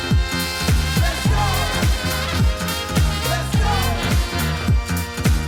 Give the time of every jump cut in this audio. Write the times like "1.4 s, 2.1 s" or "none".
none